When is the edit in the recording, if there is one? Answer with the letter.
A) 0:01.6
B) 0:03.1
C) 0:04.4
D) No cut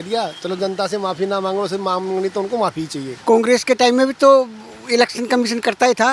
B